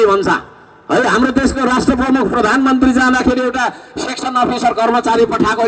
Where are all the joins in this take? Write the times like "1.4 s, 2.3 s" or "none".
none